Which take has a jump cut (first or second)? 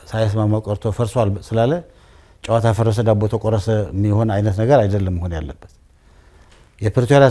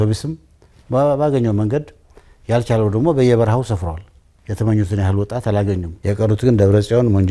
second